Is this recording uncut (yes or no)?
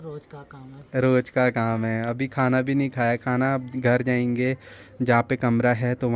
yes